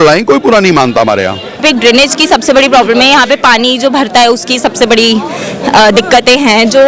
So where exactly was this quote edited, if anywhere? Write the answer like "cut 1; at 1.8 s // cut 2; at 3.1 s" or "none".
cut 1; at 1.6 s